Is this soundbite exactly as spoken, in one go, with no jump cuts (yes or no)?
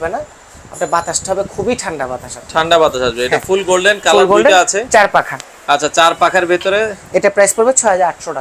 yes